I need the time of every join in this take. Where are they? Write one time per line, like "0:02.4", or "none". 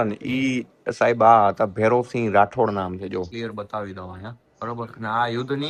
none